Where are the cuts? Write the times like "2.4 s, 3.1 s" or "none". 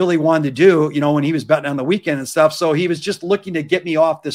none